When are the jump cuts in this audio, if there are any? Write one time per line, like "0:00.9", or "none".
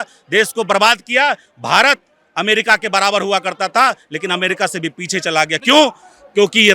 none